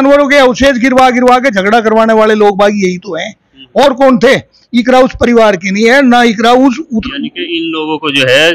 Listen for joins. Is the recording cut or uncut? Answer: uncut